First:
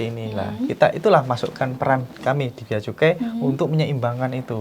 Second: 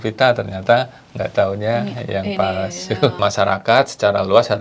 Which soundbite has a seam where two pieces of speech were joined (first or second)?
second